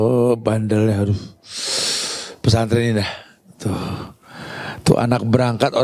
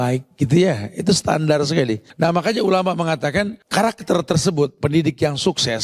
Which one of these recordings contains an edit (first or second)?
second